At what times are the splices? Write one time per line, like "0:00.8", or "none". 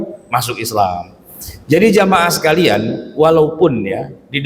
none